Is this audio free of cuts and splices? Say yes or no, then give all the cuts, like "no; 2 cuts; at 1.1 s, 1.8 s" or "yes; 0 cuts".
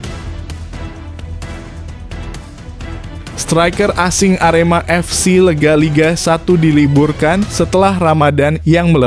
no; 1 cut; at 3.5 s